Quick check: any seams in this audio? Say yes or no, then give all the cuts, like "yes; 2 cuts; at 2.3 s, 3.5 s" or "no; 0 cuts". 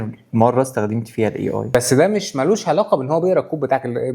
yes; 1 cut; at 1.7 s